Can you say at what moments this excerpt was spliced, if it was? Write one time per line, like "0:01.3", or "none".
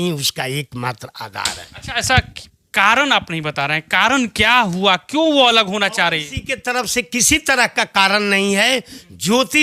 none